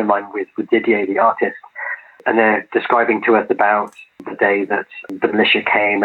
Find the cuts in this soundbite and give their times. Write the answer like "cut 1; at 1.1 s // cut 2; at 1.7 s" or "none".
cut 1; at 5.1 s